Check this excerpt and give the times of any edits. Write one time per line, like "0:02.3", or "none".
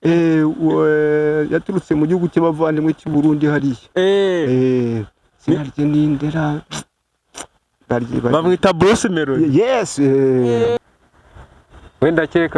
0:10.8